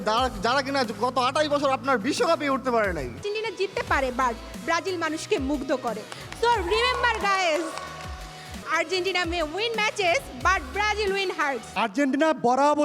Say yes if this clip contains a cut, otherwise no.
yes